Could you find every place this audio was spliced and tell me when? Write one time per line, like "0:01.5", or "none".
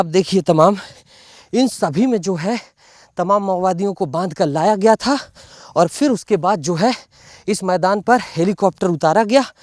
none